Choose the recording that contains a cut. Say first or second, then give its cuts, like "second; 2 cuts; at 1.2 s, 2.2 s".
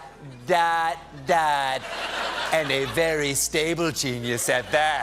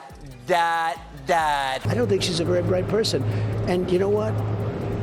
first; 1 cut; at 1.8 s